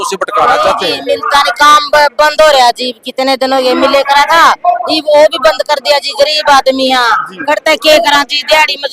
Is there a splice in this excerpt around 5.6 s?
no; 1 cut; at 1.0 s

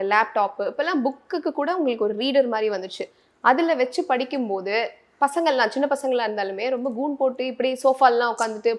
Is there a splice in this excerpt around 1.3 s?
no; 0 cuts

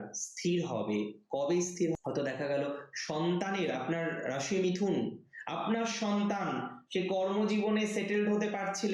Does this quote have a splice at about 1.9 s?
yes; 1 cut; at 1.9 s

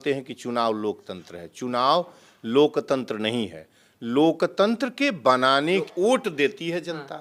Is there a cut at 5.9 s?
yes; 1 cut; at 5.9 s

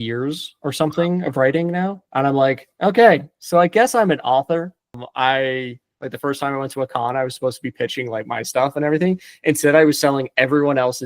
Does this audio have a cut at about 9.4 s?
no; 1 cut; at 5.0 s

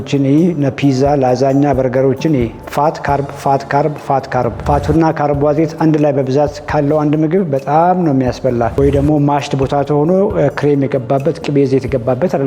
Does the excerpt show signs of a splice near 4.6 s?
yes; 2 cuts; at 4.6 s, 8.7 s

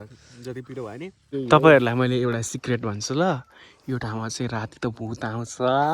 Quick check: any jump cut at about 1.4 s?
yes; 1 cut; at 1.4 s

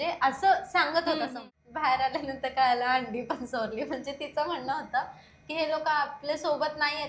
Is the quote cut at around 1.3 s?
yes; 1 cut; at 1.3 s

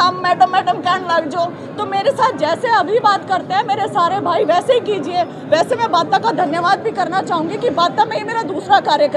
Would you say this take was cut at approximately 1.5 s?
no; 0 cuts

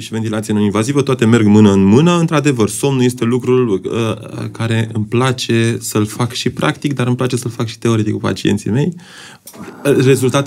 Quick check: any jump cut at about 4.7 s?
no; 0 cuts

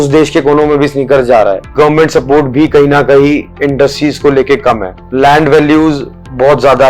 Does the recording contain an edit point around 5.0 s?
yes; 2 cuts; at 1.7 s, 5.0 s

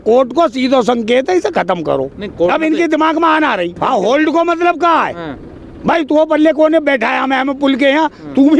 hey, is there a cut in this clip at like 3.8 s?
yes; 1 cut; at 3.8 s

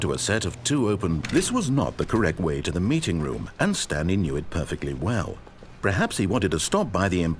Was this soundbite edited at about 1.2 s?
yes; 1 cut; at 1.2 s

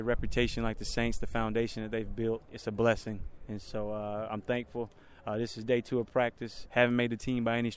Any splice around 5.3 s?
no; 2 cuts; at 2.5 s, 6.5 s

